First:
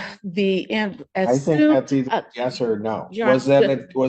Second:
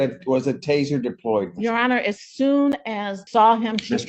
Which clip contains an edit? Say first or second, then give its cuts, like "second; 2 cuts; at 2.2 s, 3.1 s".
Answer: second; 1 cut; at 3.2 s